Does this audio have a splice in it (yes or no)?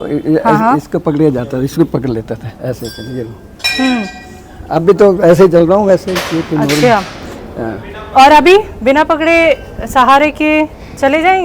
no